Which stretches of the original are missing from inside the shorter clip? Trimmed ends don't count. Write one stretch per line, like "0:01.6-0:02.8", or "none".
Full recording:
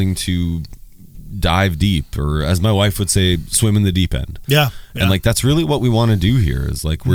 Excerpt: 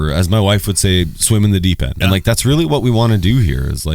0:04.2-0:04.9